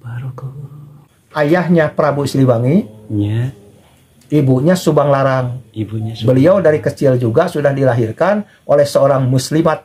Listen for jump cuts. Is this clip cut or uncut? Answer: cut